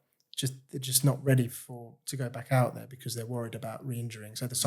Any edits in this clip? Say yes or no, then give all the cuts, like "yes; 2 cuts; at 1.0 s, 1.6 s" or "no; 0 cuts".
no; 0 cuts